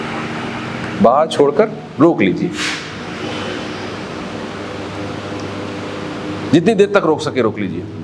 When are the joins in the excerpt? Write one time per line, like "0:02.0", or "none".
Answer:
none